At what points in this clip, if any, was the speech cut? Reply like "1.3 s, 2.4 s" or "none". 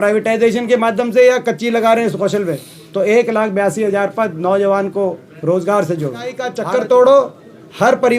6.5 s